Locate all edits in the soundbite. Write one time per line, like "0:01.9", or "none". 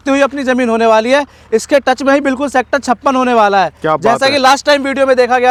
none